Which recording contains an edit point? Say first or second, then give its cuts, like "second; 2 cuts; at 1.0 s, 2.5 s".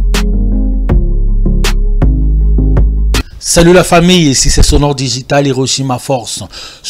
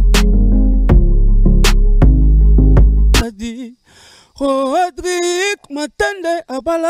second; 1 cut; at 3.0 s